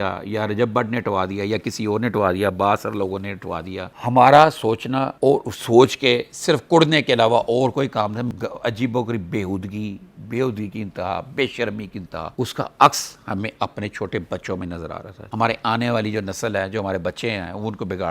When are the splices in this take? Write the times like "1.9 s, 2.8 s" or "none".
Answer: 3.9 s, 8.3 s, 12.3 s, 15.3 s